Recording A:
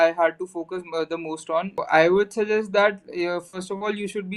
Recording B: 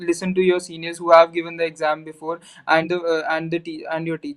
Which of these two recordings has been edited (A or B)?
A